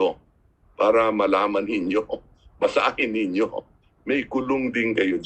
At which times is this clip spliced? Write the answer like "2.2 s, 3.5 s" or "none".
none